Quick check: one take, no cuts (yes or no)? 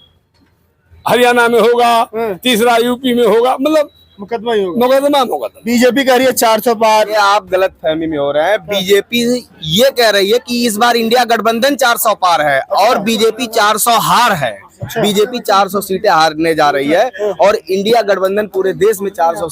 no